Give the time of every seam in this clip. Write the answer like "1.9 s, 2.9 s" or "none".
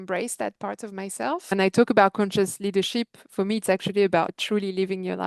1.5 s, 4.3 s